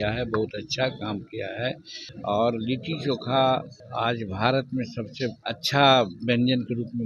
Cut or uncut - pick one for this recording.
cut